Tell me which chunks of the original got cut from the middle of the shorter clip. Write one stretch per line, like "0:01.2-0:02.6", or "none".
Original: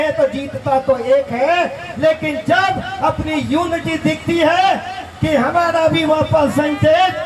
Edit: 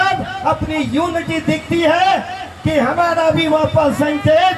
none